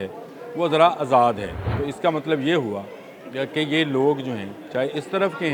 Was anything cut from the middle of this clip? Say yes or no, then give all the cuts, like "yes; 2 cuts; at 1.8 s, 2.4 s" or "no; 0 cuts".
yes; 1 cut; at 1.6 s